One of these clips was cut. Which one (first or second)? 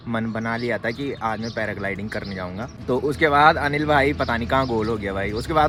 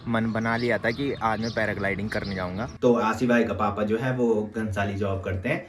second